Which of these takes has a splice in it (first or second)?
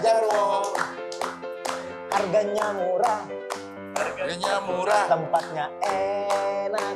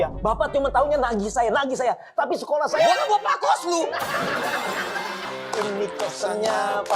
second